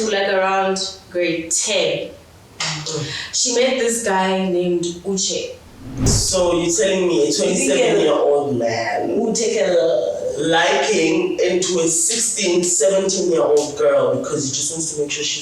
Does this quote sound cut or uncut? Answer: cut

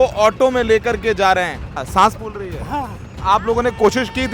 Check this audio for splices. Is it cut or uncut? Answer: cut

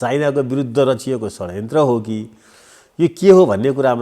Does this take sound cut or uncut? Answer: uncut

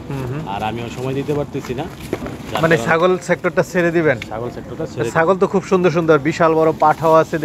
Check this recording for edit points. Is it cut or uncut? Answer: uncut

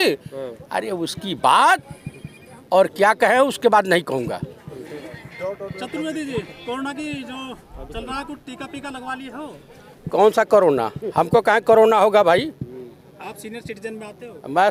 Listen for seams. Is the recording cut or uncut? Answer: uncut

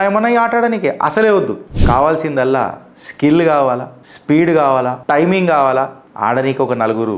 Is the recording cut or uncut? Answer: uncut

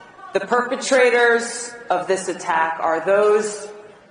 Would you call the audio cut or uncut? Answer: cut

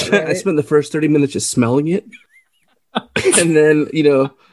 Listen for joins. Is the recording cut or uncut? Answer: uncut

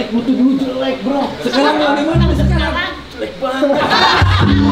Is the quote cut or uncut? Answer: uncut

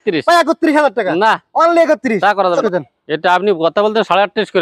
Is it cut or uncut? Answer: cut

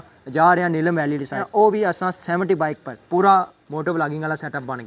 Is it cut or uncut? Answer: cut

